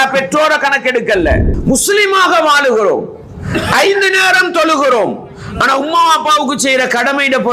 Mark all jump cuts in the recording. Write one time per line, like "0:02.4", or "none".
0:01.5